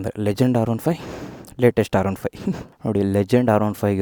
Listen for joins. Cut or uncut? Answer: uncut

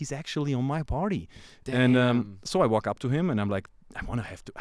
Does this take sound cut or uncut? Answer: uncut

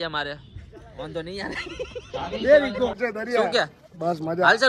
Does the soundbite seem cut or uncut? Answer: cut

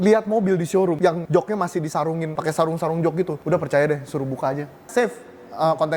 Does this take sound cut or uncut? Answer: cut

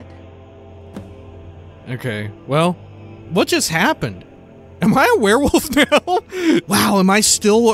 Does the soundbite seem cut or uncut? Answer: cut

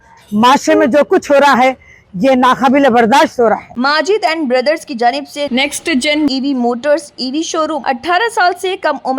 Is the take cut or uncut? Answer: cut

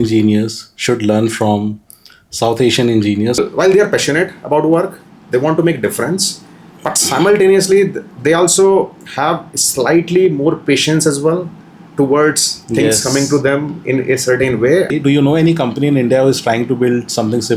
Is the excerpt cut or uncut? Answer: cut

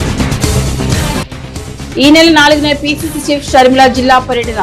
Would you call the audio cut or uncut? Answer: uncut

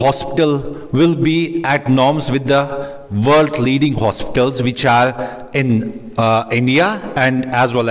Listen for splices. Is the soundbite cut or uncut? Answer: uncut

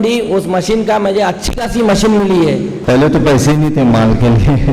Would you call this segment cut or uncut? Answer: cut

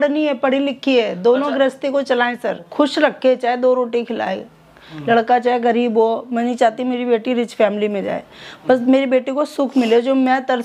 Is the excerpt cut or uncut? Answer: cut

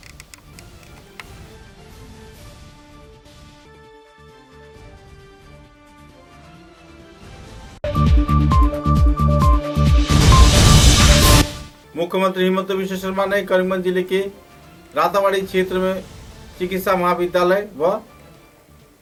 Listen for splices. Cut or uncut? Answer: uncut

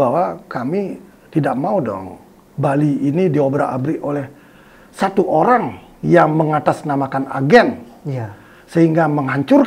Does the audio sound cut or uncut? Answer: uncut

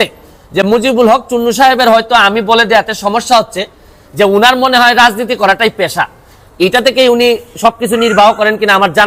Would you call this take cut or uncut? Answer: uncut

